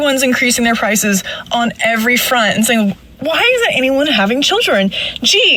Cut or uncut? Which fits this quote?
uncut